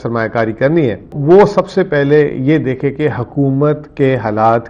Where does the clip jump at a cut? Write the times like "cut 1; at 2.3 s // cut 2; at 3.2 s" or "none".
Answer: cut 1; at 1.2 s